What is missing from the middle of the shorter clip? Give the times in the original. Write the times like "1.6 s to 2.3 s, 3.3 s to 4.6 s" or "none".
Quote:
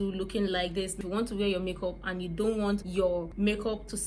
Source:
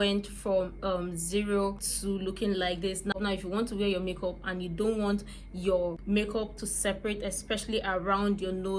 3.0 s to 3.4 s, 5.6 s to 5.9 s